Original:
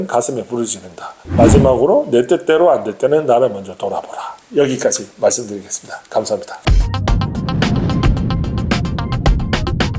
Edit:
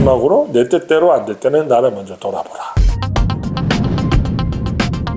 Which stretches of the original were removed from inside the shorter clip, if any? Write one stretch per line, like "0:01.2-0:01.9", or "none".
0:04.3-0:06.7